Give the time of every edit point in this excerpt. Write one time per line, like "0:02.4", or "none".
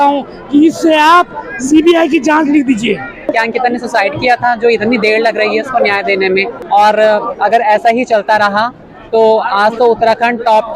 0:03.2
0:06.6